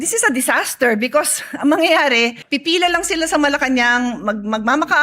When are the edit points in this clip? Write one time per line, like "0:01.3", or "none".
0:02.4